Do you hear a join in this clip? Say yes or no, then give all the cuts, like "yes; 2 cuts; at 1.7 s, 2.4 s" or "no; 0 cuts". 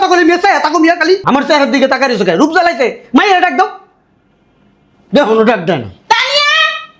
no; 0 cuts